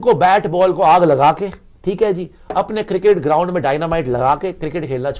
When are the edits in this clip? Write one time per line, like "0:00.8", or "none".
none

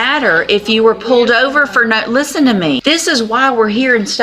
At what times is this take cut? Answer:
0:02.8

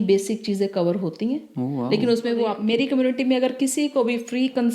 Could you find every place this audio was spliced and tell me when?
0:02.6

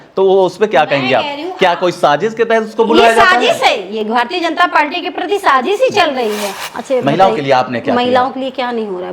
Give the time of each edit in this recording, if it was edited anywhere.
0:06.5

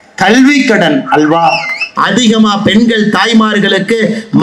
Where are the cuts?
0:01.9

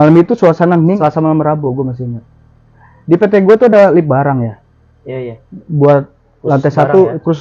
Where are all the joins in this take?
0:01.0

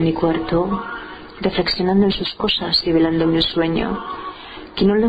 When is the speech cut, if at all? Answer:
0:03.3

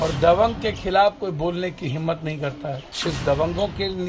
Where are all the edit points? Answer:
0:02.9

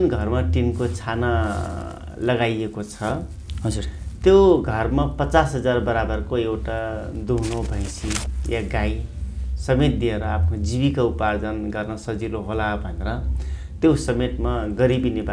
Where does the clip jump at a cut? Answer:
none

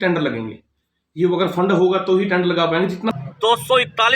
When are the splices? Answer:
0:03.1

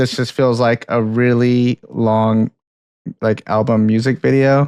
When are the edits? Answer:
none

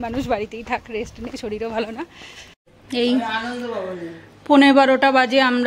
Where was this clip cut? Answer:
0:02.6

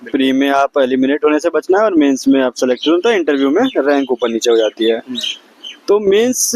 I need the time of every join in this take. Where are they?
none

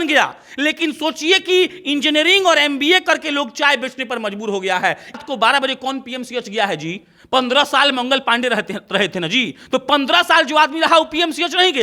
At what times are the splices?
0:05.2

